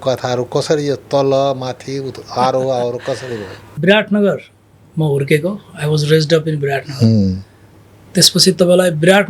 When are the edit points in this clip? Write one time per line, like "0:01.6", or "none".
0:03.6